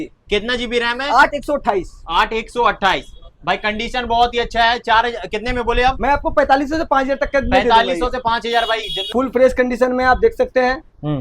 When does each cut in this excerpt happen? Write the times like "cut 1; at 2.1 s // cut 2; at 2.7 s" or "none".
cut 1; at 9.1 s